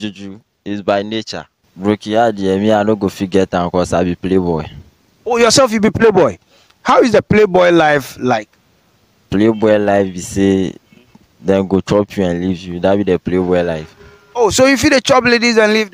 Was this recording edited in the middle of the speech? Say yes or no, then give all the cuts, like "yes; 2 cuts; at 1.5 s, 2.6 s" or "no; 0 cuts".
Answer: yes; 1 cut; at 1.6 s